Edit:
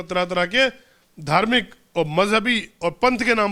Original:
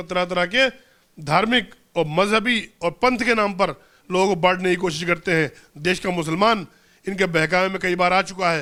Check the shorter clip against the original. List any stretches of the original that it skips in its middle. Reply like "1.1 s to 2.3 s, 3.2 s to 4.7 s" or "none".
none